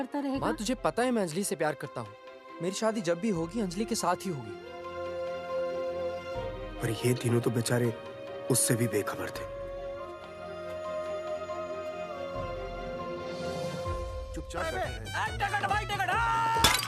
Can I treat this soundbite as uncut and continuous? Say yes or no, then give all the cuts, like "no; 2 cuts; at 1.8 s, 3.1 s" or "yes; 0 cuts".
no; 1 cut; at 14.6 s